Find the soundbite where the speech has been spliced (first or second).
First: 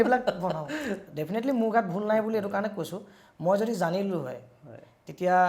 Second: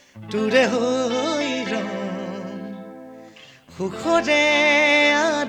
first